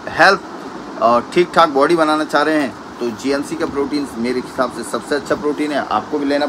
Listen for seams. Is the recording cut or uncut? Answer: uncut